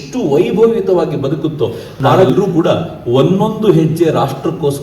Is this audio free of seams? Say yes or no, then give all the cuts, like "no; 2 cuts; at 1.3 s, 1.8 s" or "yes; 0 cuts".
no; 1 cut; at 2.2 s